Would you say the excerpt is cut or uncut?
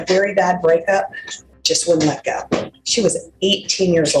uncut